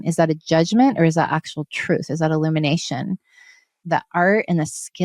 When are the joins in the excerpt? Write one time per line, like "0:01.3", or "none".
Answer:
0:03.8